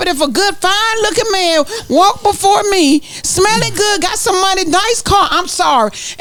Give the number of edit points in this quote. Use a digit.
0